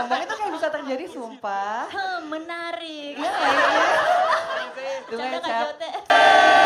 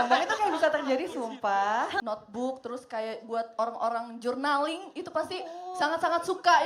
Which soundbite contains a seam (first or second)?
second